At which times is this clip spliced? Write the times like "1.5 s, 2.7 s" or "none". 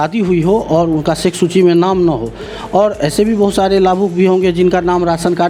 none